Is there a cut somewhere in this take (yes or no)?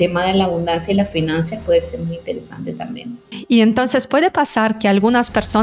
yes